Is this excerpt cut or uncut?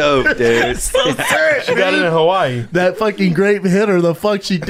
uncut